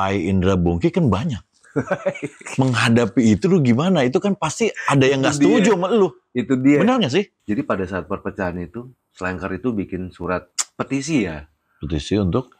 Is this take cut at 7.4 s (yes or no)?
yes